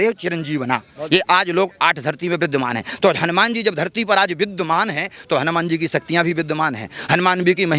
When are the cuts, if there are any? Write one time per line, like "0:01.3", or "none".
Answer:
none